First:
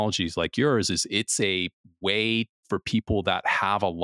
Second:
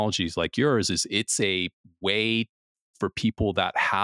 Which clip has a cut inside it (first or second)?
first